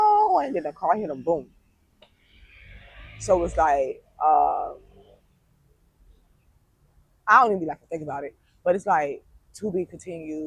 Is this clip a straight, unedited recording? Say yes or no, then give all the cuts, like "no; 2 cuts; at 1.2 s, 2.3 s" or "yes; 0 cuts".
yes; 0 cuts